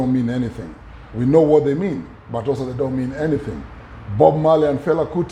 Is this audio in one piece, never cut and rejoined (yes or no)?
yes